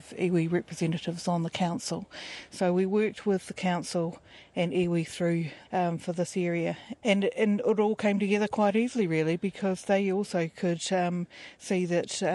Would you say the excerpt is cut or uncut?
cut